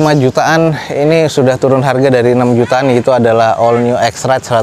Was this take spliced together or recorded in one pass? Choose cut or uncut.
uncut